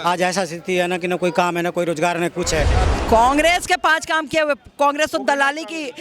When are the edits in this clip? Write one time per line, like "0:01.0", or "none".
0:02.8